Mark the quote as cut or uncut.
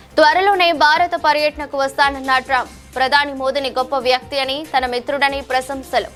uncut